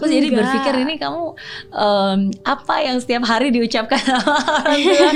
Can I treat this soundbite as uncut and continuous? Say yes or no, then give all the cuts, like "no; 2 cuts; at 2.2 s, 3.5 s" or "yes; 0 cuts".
yes; 0 cuts